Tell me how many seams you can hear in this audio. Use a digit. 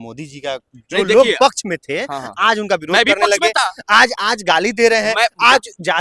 0